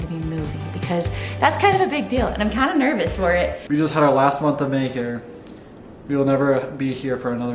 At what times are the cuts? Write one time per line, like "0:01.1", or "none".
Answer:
0:03.6

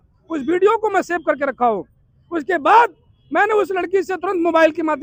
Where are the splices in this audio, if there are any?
none

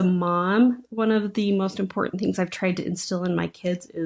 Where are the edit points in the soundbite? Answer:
none

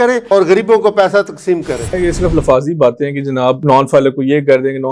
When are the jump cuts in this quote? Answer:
0:01.9

